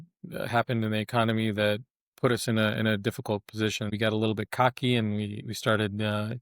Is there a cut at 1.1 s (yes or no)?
no